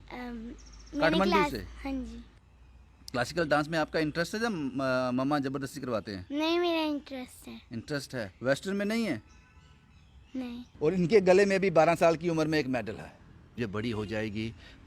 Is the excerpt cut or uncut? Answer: cut